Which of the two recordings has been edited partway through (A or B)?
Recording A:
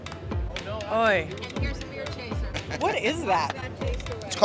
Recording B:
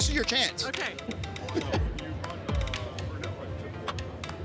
B